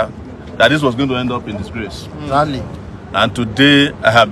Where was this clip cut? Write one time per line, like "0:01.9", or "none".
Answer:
none